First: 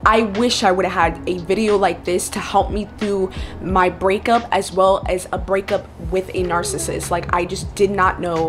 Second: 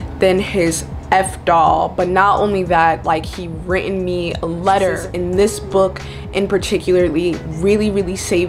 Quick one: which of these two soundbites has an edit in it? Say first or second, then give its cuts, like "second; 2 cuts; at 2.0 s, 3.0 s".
second; 1 cut; at 5.1 s